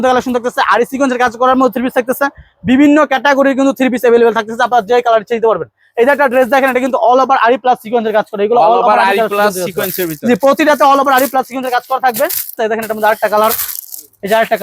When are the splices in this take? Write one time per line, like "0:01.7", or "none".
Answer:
0:12.6